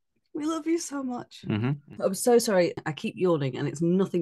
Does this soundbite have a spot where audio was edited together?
yes; 2 cuts; at 1.8 s, 2.9 s

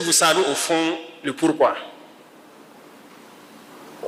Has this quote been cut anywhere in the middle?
no; 0 cuts

